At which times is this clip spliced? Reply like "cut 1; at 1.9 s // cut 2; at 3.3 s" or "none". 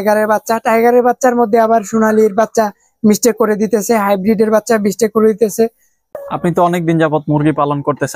cut 1; at 6.1 s